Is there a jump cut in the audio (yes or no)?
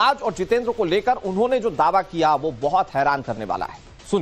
yes